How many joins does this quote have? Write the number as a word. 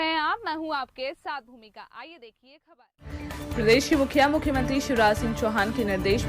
one